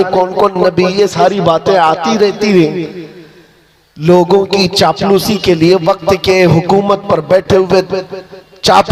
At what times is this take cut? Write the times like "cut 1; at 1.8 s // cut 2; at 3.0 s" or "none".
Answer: none